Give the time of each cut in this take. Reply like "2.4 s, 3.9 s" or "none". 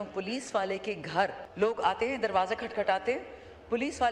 1.4 s